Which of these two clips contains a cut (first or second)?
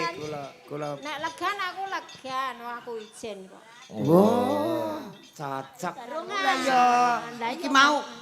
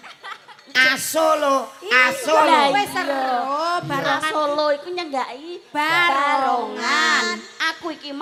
first